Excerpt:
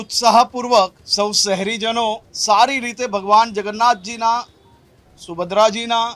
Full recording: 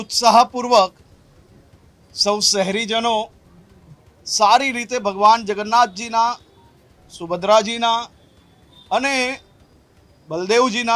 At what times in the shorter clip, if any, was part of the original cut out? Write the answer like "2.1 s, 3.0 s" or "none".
1.0 s, 2.3 s